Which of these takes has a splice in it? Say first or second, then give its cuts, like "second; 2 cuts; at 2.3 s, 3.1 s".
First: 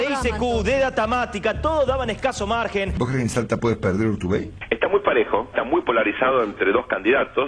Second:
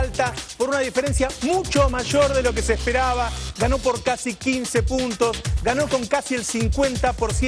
first; 1 cut; at 2.9 s